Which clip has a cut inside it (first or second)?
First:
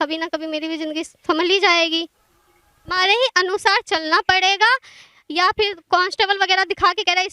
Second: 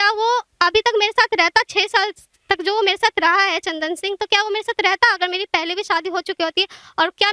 first